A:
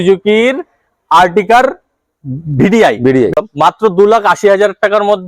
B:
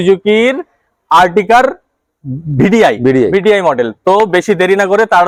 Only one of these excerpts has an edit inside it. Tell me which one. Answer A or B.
A